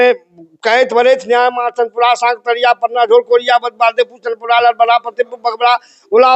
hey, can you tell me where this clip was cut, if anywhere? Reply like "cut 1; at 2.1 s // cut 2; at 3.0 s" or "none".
none